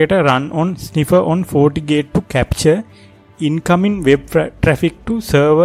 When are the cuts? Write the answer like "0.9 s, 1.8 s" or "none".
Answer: none